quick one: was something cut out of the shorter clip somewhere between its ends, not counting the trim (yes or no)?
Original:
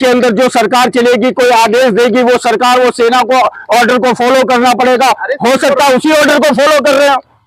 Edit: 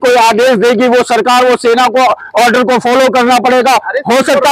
no